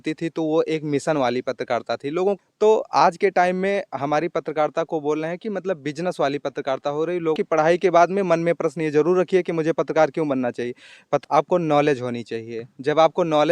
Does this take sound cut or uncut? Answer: cut